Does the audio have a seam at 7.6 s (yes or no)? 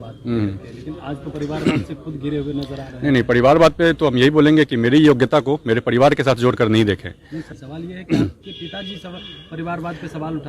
yes